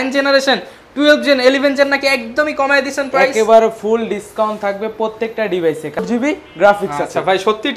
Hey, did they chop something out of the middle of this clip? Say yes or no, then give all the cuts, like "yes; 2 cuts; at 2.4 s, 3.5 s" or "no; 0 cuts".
yes; 1 cut; at 6.0 s